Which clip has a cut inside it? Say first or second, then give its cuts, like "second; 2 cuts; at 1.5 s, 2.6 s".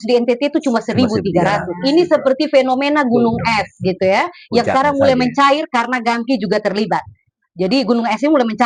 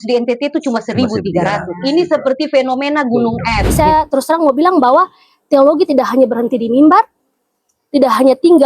second; 1 cut; at 3.6 s